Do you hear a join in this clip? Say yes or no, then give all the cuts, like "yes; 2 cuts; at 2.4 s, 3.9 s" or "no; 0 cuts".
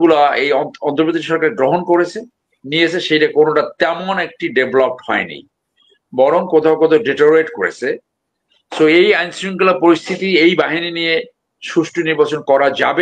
no; 0 cuts